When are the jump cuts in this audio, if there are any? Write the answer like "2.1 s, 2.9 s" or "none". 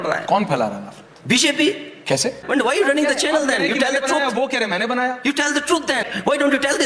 2.4 s, 6.0 s